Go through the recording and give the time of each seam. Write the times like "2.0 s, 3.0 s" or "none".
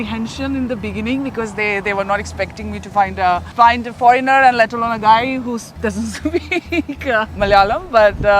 3.5 s, 7.4 s